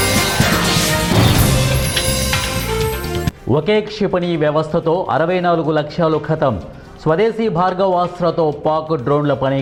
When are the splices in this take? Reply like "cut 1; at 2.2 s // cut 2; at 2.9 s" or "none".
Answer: none